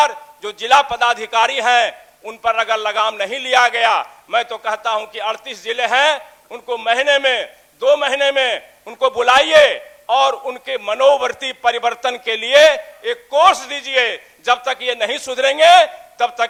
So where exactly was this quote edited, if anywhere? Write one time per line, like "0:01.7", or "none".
none